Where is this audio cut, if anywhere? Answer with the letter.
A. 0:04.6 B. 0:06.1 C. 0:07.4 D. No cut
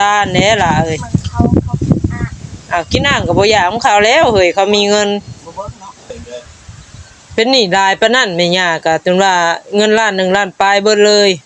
B